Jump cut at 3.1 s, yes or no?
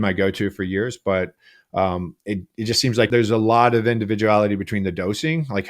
yes